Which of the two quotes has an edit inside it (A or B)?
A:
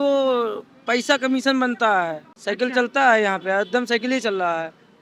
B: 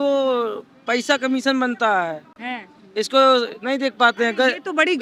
A